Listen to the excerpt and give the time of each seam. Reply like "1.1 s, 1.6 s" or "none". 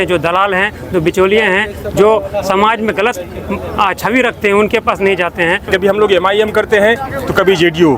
5.6 s